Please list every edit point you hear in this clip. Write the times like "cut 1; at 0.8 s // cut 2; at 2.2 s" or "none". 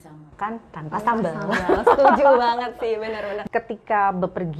cut 1; at 3.4 s